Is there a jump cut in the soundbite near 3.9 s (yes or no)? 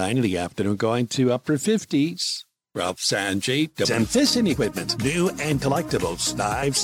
yes